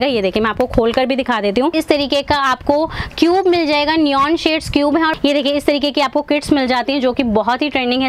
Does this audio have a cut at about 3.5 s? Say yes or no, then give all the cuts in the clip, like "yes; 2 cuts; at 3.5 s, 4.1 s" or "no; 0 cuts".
no; 2 cuts; at 1.7 s, 5.1 s